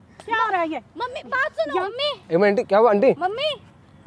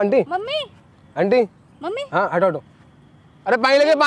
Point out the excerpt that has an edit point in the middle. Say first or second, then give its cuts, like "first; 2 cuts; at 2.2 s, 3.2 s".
first; 1 cut; at 1.9 s